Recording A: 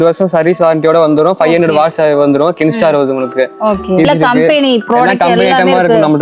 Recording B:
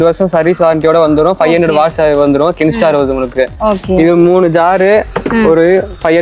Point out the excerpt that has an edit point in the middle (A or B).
A